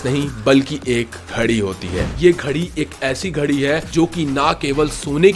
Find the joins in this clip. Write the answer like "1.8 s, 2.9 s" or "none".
1.2 s, 2.0 s, 3.9 s